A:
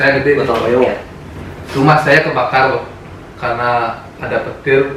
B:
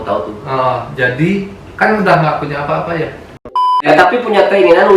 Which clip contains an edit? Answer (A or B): B